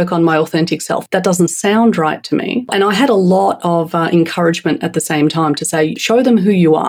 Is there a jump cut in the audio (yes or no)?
yes